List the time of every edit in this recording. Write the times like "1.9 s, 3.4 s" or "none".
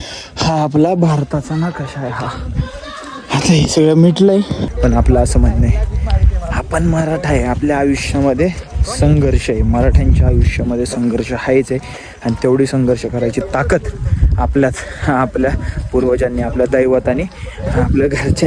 4.6 s